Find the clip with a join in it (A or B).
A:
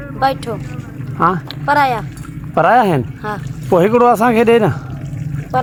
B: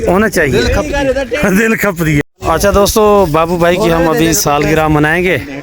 B